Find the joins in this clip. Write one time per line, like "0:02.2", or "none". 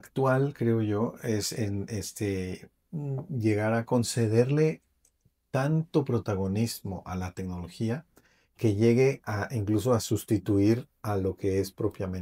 none

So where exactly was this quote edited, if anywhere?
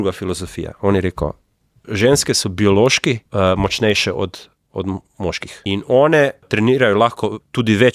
0:03.2
0:05.5
0:06.5

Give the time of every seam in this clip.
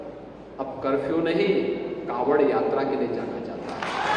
none

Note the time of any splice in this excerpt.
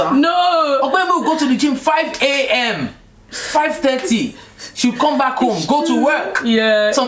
none

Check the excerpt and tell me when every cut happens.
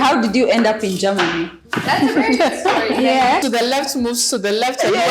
0:03.4

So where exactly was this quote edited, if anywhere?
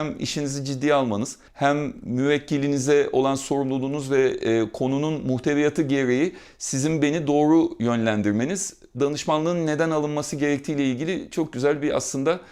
none

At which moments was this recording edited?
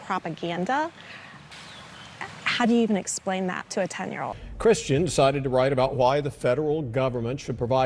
0:04.4

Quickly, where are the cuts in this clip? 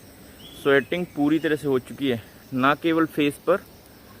none

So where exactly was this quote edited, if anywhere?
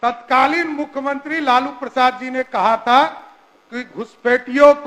none

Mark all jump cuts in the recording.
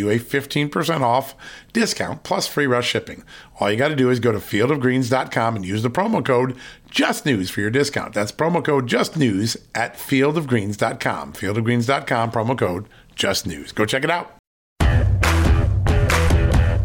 0:14.7

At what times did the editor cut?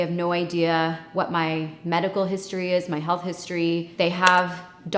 none

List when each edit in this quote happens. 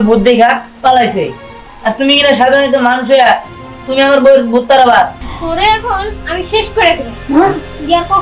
0:05.2

